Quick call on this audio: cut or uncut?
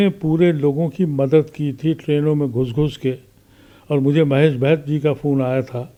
uncut